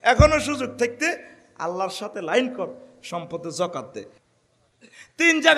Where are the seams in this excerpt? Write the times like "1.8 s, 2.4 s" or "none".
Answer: 4.2 s

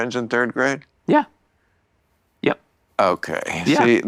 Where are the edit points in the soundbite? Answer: none

